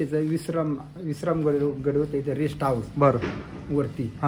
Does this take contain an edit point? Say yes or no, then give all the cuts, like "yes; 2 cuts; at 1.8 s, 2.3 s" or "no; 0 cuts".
no; 0 cuts